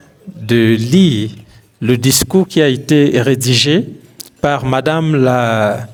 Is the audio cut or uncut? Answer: uncut